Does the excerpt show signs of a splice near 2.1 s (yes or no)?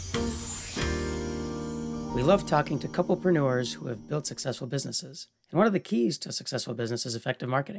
yes